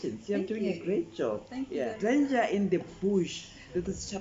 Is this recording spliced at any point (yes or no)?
yes